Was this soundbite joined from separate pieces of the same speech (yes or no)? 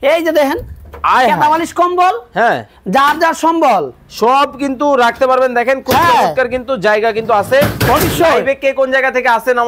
no